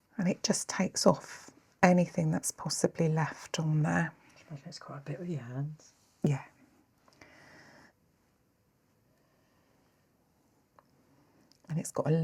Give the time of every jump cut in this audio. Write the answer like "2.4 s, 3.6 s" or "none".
7.9 s